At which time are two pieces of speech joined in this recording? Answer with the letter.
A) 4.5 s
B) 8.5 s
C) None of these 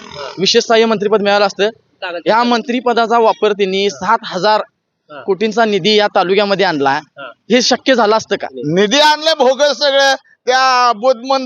B